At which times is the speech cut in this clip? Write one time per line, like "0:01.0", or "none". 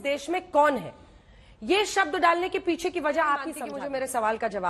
0:03.6